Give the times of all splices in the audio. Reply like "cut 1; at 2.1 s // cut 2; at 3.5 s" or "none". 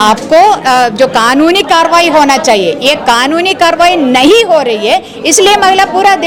none